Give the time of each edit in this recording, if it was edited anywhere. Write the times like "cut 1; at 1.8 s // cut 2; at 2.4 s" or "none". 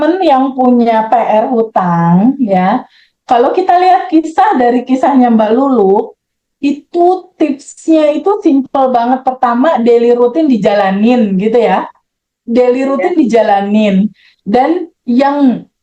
none